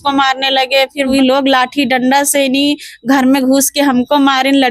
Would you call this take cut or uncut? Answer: cut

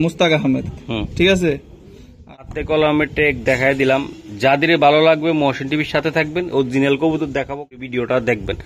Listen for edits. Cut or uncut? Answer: cut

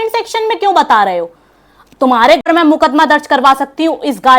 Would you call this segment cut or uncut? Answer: cut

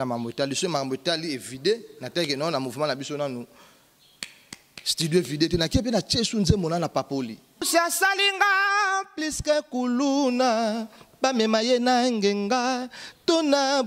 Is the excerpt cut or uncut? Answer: cut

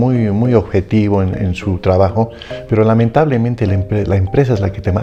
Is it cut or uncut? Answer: uncut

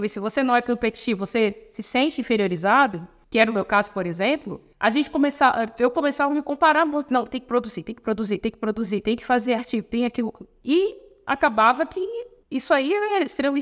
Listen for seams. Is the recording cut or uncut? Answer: uncut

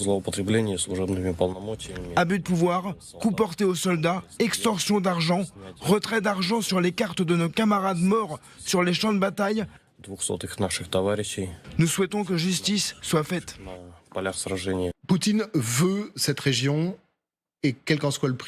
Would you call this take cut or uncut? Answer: cut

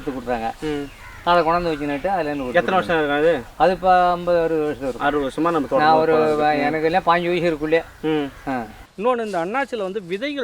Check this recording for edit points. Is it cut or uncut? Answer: cut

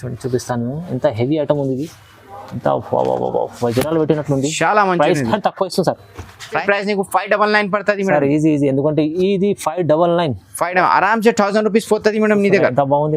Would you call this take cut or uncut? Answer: cut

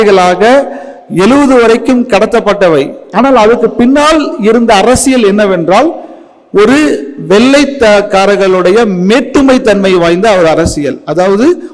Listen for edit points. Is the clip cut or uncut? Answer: uncut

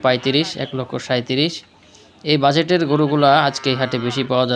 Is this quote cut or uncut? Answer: uncut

